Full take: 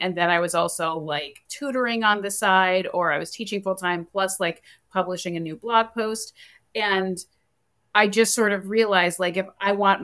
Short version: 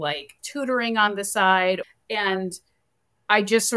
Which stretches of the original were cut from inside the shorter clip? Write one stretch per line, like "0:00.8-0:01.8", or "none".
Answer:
0:02.9-0:06.5